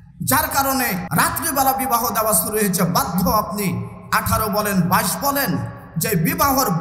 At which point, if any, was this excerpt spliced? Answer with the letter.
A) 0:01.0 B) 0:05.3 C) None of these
A